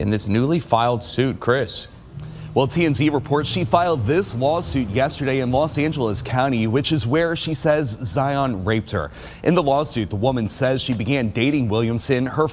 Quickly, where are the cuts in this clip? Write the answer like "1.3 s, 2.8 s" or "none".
none